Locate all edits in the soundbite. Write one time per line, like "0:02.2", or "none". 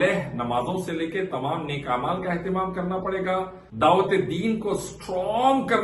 0:03.6